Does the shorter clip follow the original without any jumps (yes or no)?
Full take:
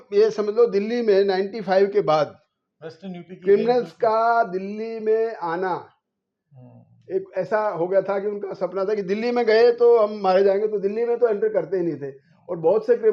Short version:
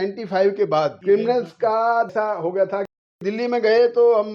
no